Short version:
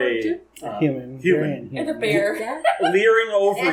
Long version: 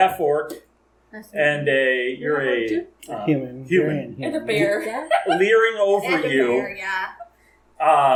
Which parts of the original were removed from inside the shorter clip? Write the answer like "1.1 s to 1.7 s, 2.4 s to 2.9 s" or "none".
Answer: none